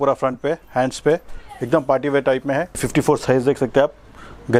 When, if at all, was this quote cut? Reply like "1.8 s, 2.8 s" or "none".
2.7 s